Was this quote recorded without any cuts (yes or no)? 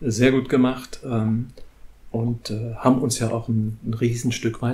yes